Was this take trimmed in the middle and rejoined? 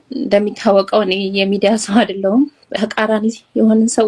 yes; 1 cut; at 2.7 s

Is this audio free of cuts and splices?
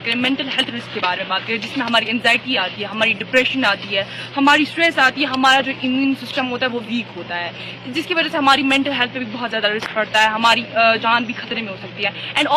yes; 0 cuts

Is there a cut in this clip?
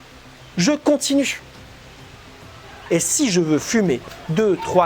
yes; 1 cut; at 2.8 s

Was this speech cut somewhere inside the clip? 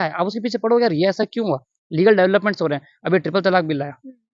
no; 0 cuts

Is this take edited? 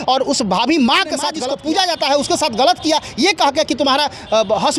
yes; 1 cut; at 1.3 s

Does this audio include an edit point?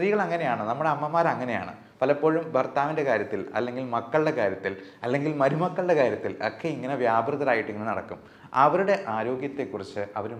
no; 0 cuts

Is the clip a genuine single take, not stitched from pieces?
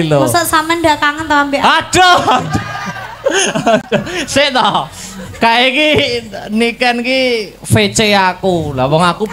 yes; 0 cuts

